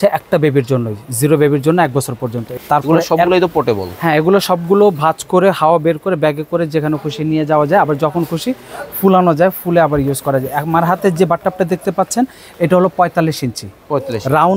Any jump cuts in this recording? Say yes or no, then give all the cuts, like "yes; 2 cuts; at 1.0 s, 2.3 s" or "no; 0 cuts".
yes; 1 cut; at 2.5 s